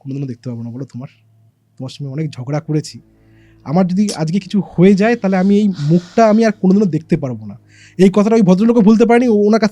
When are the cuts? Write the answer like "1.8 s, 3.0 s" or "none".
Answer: none